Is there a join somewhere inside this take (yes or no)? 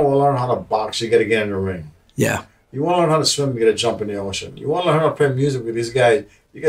no